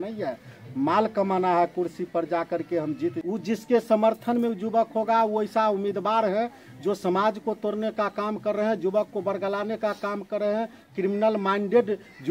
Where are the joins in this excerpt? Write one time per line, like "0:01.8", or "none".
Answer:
0:03.2

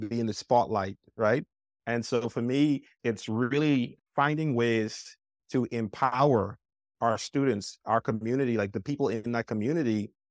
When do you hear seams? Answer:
0:02.9
0:03.9

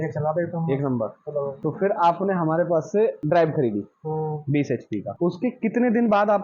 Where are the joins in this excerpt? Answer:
0:01.5
0:03.2
0:05.1

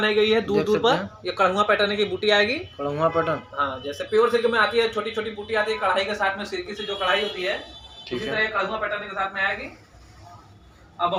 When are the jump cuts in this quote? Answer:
none

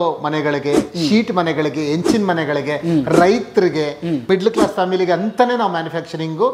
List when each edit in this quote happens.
none

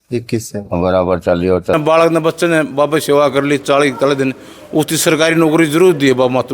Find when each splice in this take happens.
0:01.7

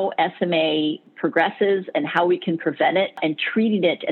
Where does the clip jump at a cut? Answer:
0:01.1
0:03.2

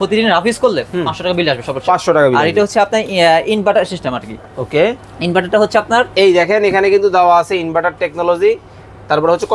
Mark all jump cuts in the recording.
none

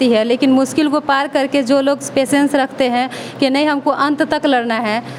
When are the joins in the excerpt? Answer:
none

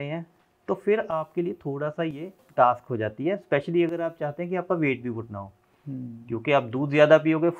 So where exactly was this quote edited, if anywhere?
0:02.4

